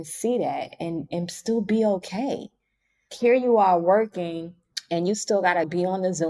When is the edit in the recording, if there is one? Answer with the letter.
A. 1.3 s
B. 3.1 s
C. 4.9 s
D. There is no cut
B